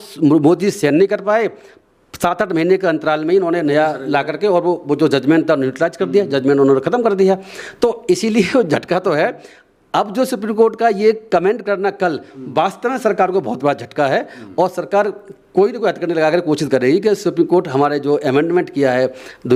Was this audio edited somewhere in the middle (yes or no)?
no